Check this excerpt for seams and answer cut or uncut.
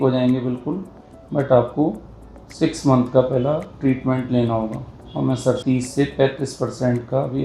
cut